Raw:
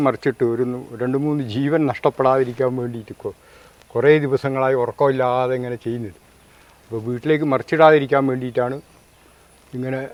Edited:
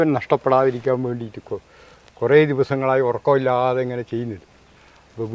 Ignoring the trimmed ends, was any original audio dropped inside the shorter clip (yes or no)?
no